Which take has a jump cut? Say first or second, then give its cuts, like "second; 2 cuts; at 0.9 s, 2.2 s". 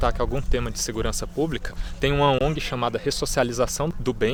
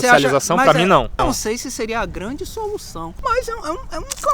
second; 2 cuts; at 1.2 s, 3.0 s